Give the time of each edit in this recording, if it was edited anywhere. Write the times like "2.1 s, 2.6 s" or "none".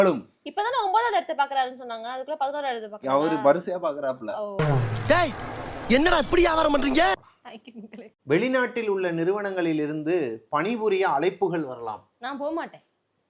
7.3 s